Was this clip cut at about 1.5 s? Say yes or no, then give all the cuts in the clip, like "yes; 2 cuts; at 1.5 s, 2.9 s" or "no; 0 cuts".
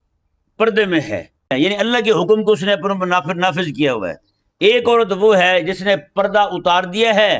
yes; 1 cut; at 1.5 s